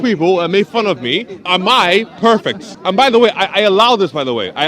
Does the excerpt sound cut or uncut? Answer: cut